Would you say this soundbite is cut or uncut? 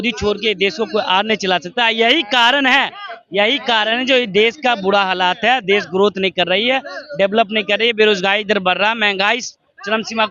uncut